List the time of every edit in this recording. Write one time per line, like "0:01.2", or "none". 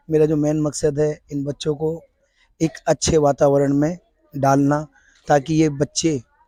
none